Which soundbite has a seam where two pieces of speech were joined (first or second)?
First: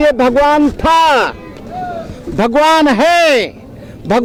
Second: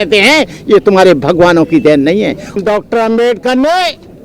second